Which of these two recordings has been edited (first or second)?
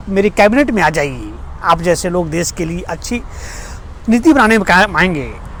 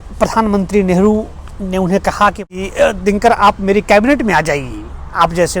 second